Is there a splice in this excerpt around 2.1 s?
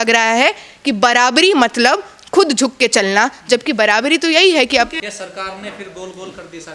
no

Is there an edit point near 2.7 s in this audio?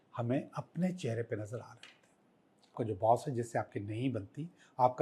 yes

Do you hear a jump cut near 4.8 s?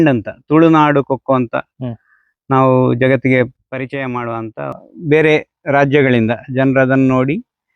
yes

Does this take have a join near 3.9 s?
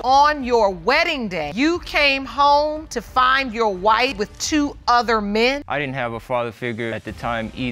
no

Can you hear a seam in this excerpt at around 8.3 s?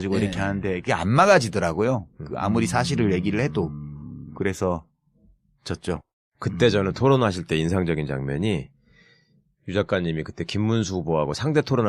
yes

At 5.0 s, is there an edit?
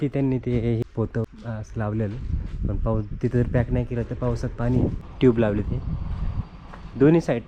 yes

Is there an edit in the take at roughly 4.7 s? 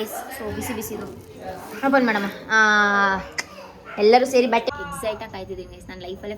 yes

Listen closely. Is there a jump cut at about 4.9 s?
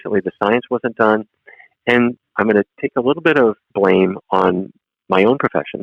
no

